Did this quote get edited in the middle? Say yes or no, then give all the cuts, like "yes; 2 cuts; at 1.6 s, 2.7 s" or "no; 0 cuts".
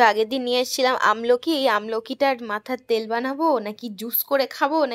no; 0 cuts